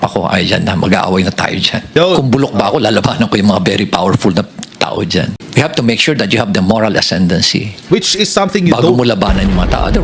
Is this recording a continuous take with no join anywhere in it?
no; 2 cuts; at 1.9 s, 5.4 s

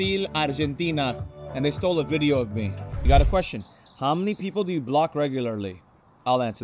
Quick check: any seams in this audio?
yes; 1 cut; at 2.9 s

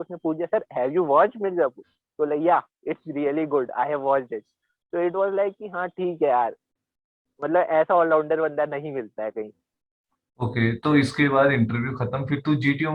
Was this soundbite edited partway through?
no; 0 cuts

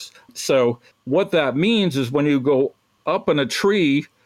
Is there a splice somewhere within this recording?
no; 0 cuts

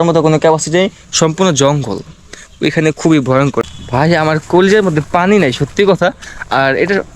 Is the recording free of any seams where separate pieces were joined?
no; 1 cut; at 3.6 s

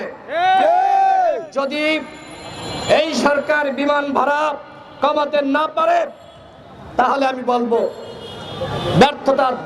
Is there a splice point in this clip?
no; 0 cuts

